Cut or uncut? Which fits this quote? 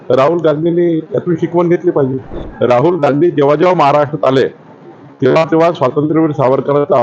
cut